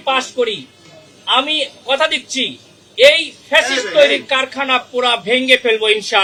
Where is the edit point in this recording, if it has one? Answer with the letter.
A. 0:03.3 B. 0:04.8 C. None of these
C